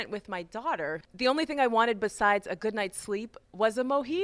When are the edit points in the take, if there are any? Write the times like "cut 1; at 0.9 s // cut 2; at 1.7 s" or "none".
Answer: cut 1; at 1.1 s